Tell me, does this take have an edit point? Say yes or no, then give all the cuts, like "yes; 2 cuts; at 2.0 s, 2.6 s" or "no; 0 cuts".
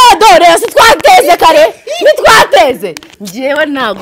no; 0 cuts